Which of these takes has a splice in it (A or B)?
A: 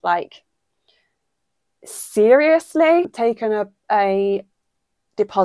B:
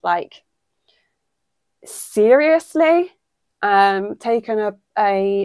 A